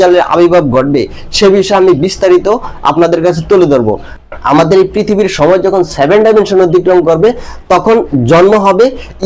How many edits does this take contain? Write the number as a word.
one